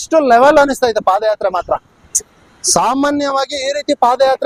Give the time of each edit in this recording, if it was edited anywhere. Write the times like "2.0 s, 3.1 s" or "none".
none